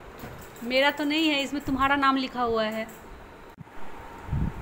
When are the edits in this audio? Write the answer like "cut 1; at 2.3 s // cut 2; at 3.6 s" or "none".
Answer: cut 1; at 3.6 s